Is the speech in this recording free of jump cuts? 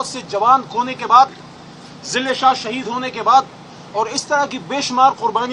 yes; 0 cuts

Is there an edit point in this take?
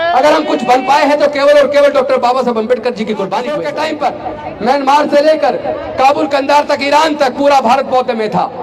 yes; 1 cut; at 3.6 s

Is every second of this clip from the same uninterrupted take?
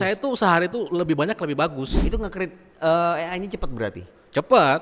no; 1 cut; at 1.9 s

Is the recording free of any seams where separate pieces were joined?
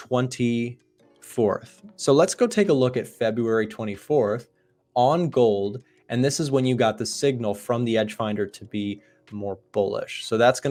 yes; 0 cuts

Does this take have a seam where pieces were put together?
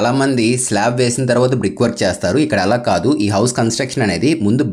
no; 0 cuts

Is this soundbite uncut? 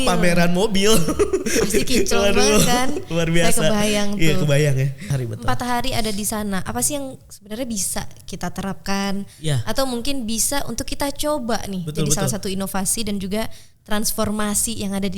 no; 1 cut; at 5.1 s

